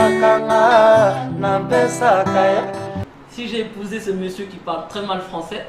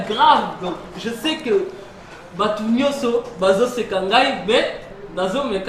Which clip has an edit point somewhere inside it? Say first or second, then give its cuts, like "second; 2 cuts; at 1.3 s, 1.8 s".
first; 1 cut; at 3.0 s